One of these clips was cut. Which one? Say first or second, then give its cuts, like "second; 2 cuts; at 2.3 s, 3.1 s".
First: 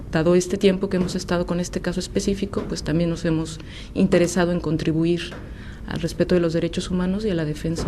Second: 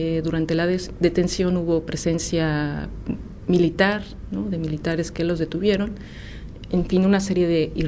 second; 1 cut; at 5.3 s